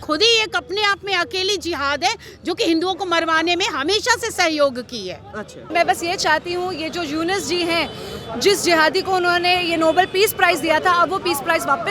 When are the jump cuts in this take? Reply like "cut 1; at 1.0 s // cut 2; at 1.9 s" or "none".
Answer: cut 1; at 5.7 s

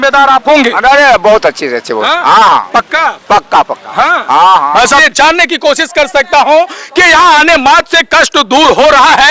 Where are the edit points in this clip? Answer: cut 1; at 5.1 s

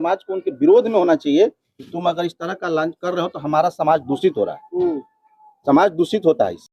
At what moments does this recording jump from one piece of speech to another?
none

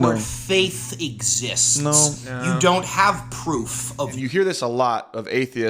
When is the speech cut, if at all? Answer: cut 1; at 4.2 s

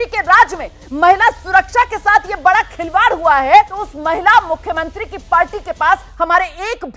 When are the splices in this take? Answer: cut 1; at 3.8 s

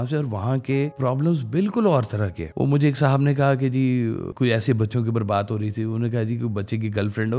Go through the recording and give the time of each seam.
cut 1; at 0.9 s // cut 2; at 2.4 s // cut 3; at 4.3 s

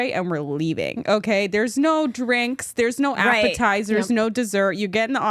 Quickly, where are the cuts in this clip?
none

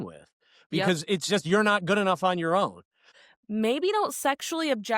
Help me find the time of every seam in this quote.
cut 1; at 3.1 s

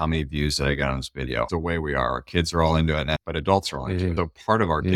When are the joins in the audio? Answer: cut 1; at 1.5 s

